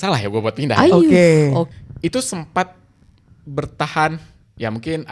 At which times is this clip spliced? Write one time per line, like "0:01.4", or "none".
0:01.8